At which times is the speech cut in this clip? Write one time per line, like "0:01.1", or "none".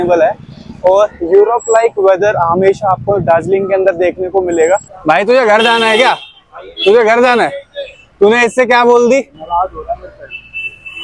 0:04.9